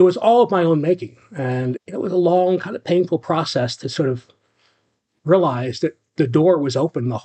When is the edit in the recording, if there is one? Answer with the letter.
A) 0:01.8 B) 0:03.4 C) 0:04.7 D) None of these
A